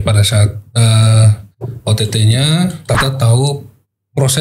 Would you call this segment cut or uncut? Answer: cut